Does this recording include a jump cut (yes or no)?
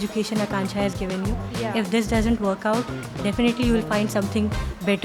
no